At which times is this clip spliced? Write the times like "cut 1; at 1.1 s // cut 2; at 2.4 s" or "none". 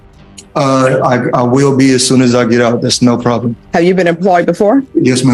none